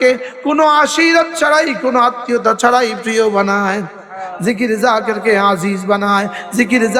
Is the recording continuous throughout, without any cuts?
yes; 0 cuts

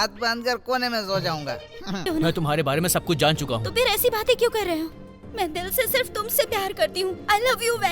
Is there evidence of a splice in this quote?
yes; 1 cut; at 2.1 s

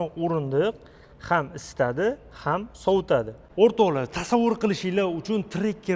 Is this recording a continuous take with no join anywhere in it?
no; 1 cut; at 3.4 s

